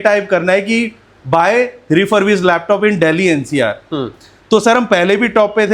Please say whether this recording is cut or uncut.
uncut